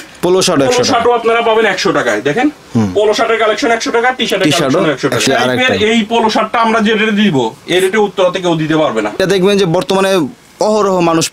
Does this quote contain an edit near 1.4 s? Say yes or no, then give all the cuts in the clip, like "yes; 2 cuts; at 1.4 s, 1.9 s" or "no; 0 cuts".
no; 2 cuts; at 5.3 s, 9.2 s